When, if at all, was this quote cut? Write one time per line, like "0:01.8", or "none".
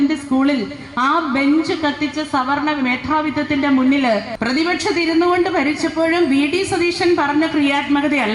0:04.3